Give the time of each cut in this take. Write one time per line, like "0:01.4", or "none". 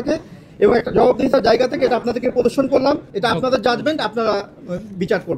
0:03.1